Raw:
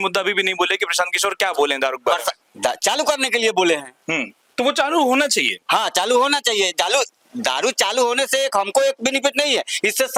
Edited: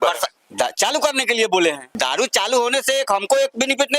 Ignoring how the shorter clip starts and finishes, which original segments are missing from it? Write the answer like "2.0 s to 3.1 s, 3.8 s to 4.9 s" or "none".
3.9 s to 7.3 s